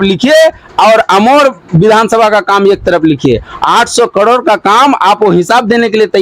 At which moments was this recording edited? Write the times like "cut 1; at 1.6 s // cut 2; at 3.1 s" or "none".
none